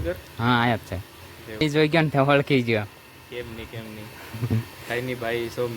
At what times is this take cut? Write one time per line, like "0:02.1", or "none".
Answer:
0:01.6